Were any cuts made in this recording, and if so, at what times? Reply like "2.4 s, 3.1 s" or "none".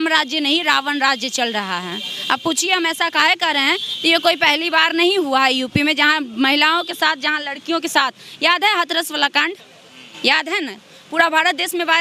none